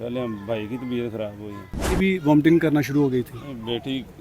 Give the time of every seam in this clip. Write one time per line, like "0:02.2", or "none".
0:01.9